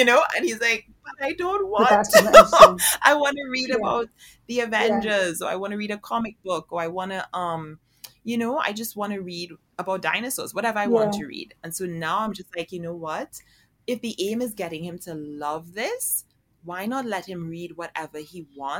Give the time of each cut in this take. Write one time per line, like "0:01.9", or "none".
none